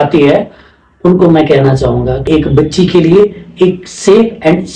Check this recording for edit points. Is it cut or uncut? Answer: cut